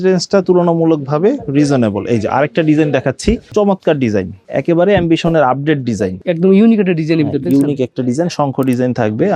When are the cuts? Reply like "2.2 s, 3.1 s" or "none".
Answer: 3.5 s, 4.4 s